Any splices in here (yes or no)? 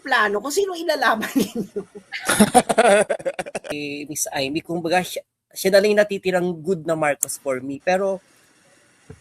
yes